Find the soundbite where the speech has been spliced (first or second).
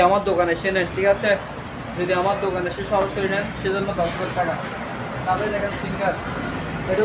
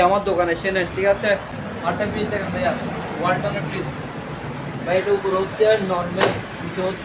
second